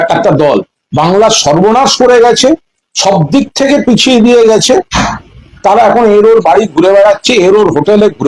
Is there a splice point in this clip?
no; 0 cuts

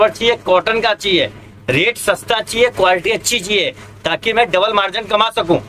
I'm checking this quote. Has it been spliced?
no; 0 cuts

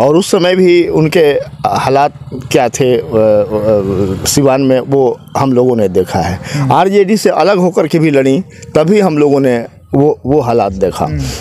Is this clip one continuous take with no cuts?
yes; 0 cuts

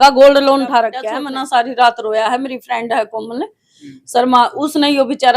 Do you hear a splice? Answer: yes; 1 cut; at 1.0 s

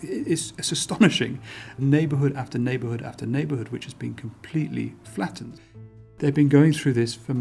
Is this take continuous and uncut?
no; 2 cuts; at 1.8 s, 5.5 s

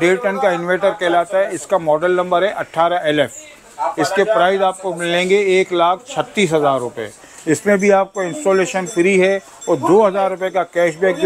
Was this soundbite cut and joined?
no; 0 cuts

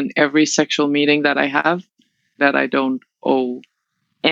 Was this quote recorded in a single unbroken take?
no; 1 cut; at 2.4 s

